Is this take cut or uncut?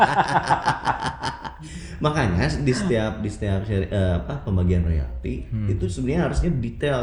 uncut